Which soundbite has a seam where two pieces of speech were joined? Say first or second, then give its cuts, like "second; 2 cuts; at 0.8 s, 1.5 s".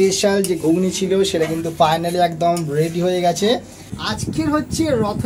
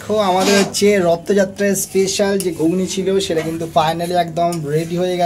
first; 1 cut; at 4.2 s